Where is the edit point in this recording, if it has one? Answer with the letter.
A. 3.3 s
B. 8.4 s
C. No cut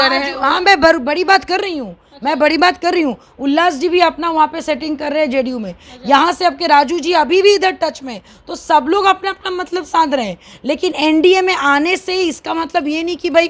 C